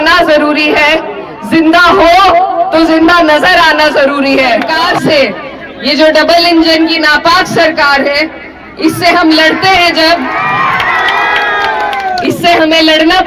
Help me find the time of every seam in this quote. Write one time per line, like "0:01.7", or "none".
0:04.8